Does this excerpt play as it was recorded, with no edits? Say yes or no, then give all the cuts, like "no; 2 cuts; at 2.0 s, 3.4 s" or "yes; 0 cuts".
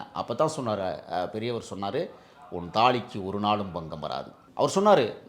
no; 1 cut; at 4.4 s